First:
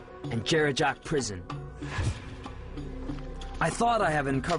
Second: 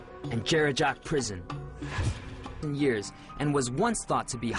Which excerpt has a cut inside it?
first; 1 cut; at 2.6 s

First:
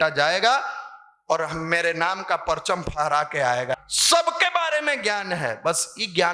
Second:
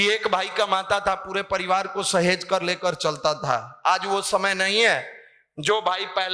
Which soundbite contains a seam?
first; 1 cut; at 3.7 s

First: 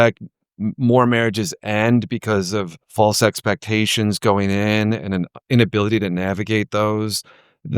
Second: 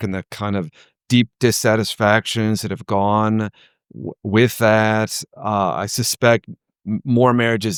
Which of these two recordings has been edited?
first; 1 cut; at 2.8 s

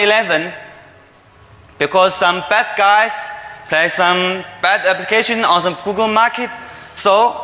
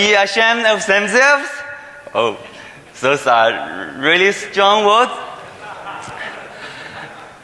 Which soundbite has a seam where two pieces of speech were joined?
second; 1 cut; at 1.5 s

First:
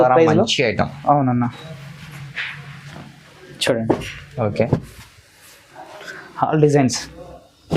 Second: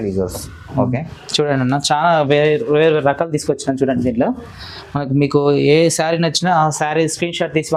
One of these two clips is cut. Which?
first; 1 cut; at 4.7 s

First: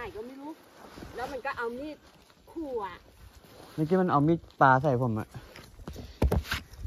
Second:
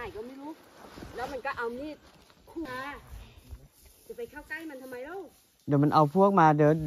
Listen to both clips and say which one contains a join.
second; 1 cut; at 2.7 s

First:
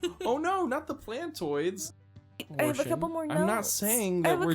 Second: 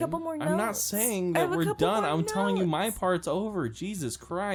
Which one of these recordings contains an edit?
first; 1 cut; at 2.0 s

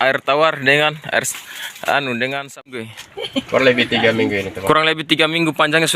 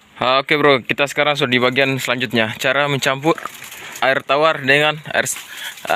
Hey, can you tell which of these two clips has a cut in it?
first; 1 cut; at 2.9 s

